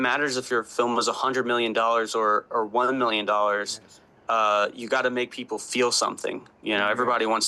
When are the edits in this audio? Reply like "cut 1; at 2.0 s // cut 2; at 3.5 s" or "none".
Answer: none